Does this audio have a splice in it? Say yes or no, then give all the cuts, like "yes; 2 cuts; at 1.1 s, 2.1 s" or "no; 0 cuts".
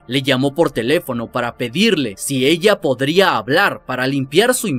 no; 0 cuts